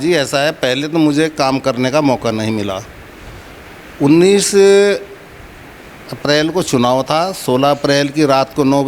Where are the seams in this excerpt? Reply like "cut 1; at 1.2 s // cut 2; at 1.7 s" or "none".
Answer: none